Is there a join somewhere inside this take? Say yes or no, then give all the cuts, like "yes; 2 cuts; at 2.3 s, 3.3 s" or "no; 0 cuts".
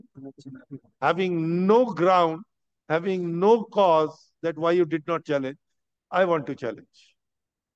no; 0 cuts